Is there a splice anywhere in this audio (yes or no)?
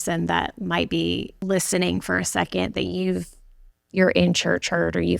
yes